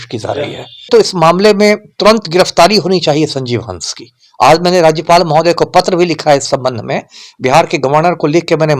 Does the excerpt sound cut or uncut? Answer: cut